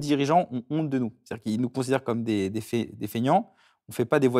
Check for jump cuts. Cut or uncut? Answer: uncut